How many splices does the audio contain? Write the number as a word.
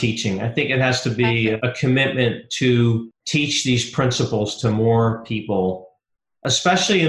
two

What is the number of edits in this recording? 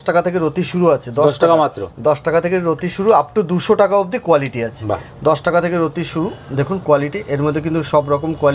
zero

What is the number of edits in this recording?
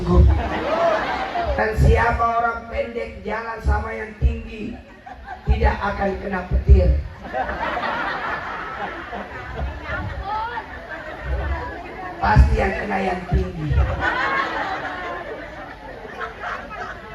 one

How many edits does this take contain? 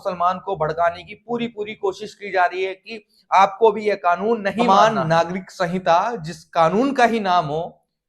one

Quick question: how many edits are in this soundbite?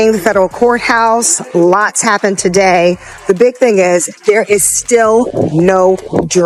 zero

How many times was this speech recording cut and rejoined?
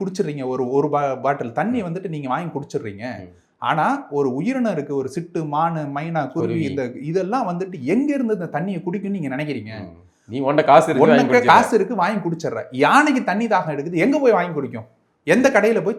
zero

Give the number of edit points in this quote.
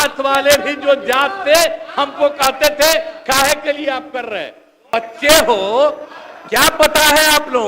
one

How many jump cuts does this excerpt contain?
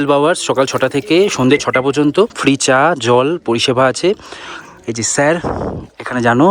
one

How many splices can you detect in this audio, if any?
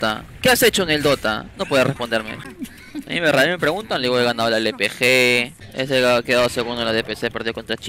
two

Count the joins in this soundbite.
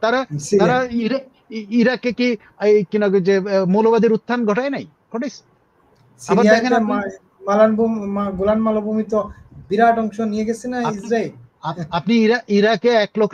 zero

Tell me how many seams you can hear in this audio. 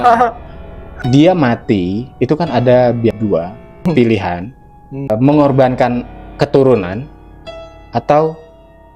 three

